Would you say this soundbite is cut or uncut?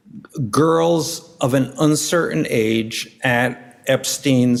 uncut